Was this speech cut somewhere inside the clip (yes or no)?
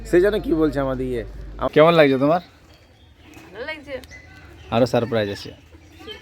yes